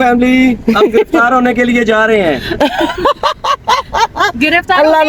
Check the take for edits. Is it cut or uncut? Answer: uncut